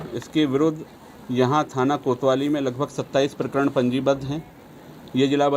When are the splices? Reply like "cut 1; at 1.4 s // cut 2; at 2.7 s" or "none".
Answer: none